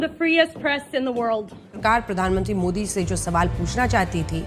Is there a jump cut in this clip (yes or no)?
yes